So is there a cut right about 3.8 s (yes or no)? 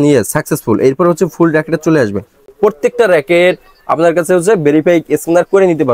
no